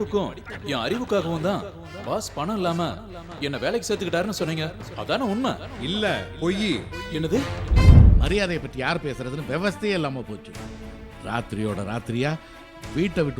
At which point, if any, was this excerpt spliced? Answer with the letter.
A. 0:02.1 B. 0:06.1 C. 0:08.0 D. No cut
C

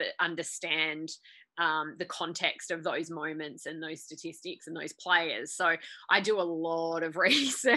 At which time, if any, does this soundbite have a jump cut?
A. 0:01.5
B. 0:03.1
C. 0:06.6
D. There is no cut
D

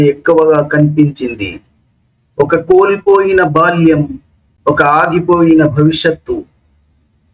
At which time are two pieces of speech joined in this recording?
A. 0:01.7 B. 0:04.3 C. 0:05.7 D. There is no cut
D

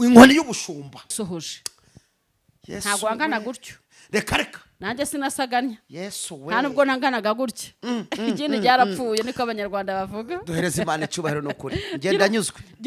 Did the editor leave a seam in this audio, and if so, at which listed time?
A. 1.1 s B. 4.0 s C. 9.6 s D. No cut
A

